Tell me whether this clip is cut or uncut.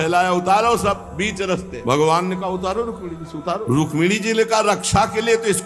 cut